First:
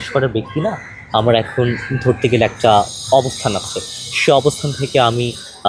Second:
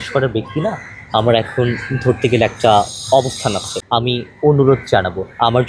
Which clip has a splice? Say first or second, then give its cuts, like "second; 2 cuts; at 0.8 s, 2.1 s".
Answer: second; 1 cut; at 4.2 s